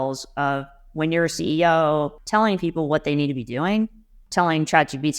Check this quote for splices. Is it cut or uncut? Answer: cut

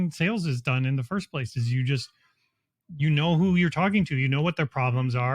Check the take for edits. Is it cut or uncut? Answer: uncut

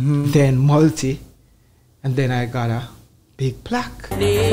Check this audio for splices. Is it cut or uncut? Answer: uncut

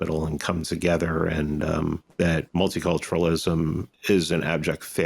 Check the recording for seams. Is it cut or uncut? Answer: cut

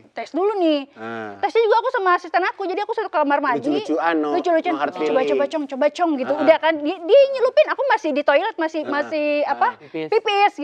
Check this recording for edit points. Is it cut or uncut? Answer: uncut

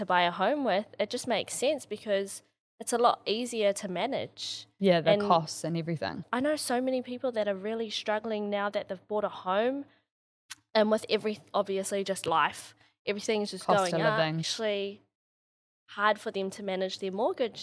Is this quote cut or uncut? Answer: uncut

